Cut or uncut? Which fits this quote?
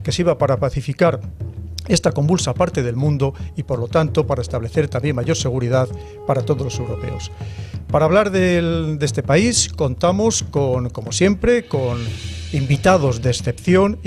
uncut